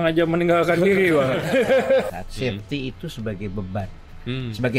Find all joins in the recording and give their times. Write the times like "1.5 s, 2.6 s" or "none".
2.1 s